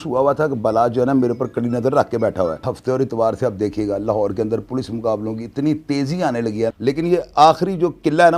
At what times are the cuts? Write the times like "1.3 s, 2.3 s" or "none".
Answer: 2.7 s, 6.8 s